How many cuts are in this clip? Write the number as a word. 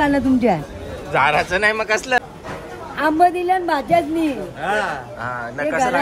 one